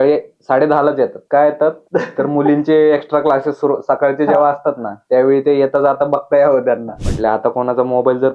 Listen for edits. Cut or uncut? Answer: cut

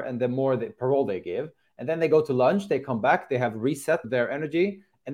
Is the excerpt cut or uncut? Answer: cut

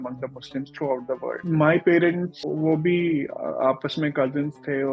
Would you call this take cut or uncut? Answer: cut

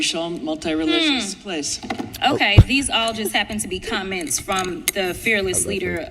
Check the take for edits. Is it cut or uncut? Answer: cut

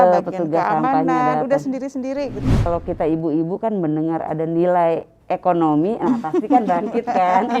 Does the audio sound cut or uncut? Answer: cut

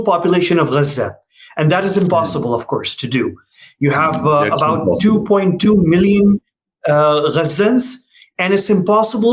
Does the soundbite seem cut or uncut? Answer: uncut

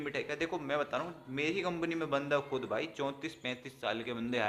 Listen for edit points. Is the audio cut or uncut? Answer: uncut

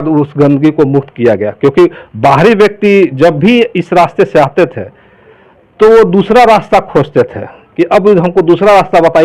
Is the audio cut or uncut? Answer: uncut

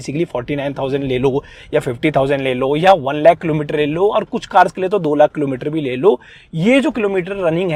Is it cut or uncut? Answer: uncut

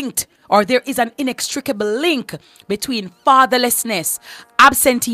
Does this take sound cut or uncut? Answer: uncut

